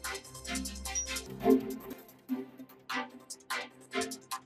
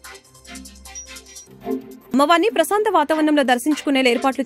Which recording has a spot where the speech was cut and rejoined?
second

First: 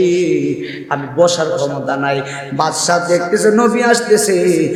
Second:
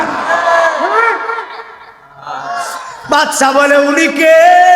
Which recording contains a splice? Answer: second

